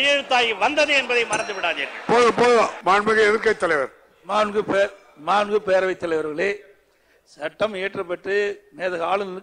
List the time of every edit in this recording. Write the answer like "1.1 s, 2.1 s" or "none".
2.8 s